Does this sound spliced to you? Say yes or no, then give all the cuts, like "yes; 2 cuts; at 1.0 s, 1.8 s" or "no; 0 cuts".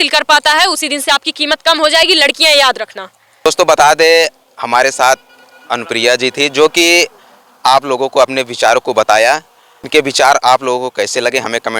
no; 0 cuts